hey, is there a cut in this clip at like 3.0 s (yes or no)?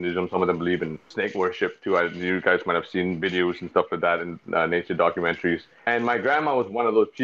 no